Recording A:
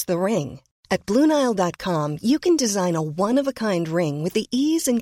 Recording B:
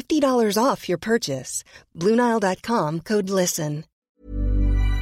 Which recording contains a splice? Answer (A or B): B